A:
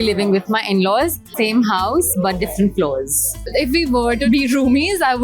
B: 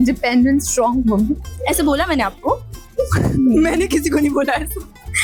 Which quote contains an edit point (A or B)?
A